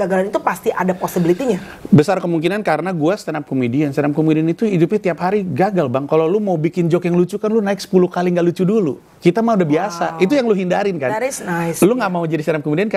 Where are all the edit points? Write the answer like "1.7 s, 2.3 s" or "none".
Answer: none